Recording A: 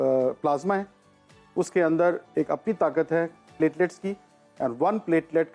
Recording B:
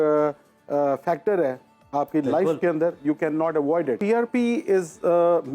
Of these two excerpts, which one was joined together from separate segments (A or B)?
B